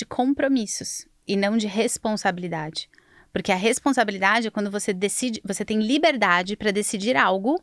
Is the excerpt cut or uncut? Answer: uncut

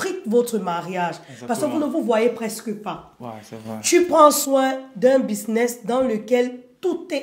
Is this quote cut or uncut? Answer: uncut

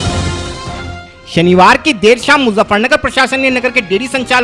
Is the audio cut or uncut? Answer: uncut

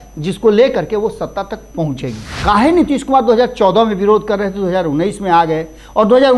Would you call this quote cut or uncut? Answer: cut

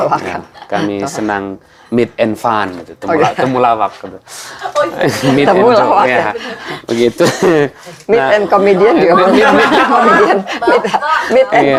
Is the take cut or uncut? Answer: uncut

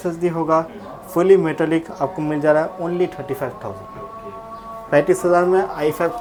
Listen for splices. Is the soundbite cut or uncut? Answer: uncut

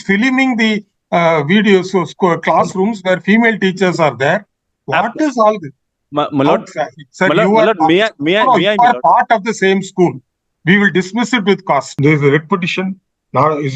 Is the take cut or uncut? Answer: cut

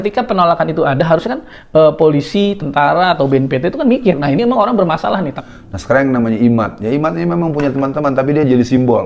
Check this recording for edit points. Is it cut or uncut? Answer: cut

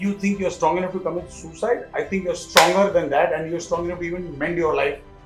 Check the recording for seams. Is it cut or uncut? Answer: uncut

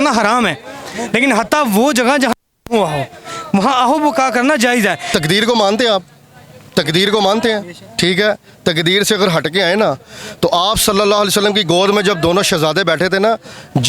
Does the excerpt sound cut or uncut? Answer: cut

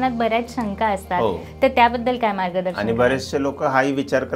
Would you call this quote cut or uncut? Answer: uncut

